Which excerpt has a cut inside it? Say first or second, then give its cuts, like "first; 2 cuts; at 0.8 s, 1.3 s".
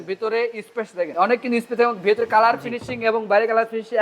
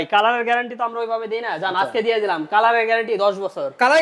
first; 1 cut; at 1.1 s